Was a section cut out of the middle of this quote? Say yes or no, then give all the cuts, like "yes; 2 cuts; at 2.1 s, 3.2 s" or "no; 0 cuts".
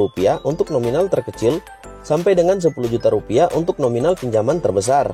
no; 0 cuts